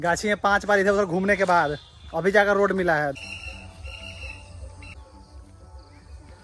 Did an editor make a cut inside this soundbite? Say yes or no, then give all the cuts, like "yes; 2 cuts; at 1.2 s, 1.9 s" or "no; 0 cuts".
yes; 2 cuts; at 3.1 s, 5.0 s